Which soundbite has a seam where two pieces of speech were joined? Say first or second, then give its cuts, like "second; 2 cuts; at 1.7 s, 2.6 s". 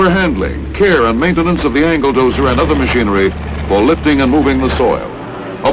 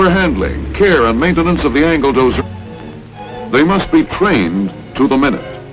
first; 1 cut; at 2.4 s